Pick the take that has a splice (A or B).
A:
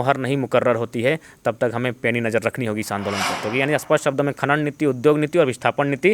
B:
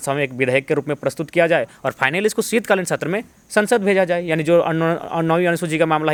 A